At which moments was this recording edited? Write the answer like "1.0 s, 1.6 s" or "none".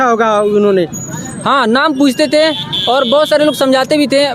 none